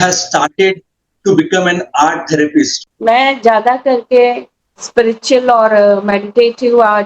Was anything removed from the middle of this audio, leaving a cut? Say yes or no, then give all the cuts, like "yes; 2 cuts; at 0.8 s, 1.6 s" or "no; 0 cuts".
yes; 1 cut; at 2.8 s